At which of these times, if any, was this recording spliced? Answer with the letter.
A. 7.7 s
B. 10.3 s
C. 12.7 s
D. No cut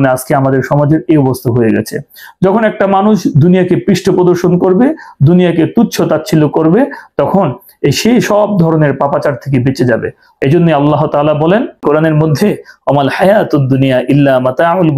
B